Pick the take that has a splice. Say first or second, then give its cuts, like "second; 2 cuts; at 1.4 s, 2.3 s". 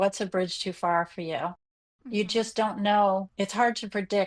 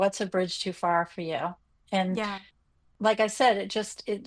first; 1 cut; at 1.7 s